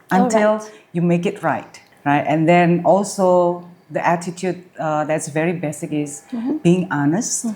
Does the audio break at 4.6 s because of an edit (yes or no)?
no